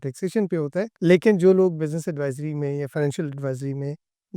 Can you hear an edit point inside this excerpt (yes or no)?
no